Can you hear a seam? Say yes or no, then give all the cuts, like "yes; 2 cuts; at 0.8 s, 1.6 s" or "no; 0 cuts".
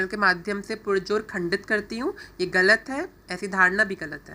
no; 0 cuts